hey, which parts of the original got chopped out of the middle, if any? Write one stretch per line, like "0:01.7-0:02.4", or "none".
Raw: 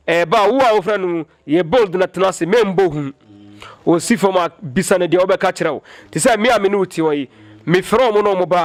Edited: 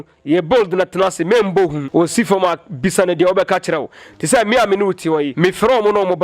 0:03.0-0:03.7
0:07.2-0:07.6